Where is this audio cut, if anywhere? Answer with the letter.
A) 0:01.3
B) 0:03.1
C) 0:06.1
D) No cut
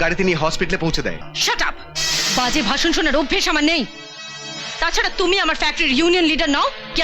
A